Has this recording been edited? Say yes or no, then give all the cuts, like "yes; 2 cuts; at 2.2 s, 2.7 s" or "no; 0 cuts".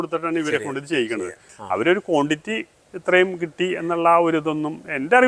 yes; 1 cut; at 1.5 s